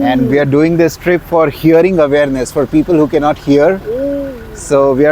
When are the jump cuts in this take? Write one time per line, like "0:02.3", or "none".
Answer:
none